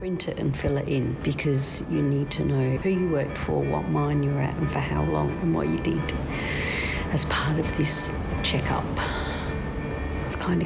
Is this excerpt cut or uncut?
cut